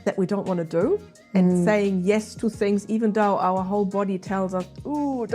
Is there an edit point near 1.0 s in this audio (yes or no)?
no